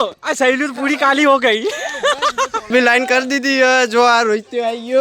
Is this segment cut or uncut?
cut